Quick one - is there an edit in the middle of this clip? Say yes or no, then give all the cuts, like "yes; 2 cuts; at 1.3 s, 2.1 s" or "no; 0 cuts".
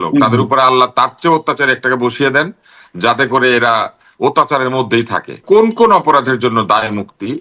yes; 1 cut; at 5.4 s